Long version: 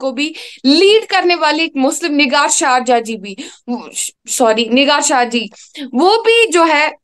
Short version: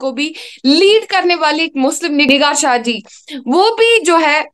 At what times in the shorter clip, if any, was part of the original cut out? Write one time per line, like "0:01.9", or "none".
0:02.3